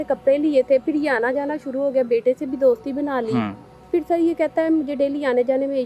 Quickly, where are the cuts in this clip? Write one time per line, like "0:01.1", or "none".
0:03.8